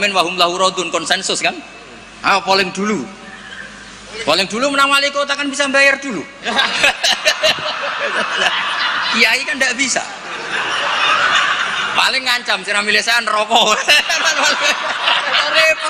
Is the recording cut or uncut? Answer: uncut